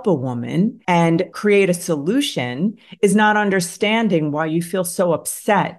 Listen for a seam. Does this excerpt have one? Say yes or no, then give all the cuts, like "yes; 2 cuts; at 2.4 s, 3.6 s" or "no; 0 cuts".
yes; 1 cut; at 1.0 s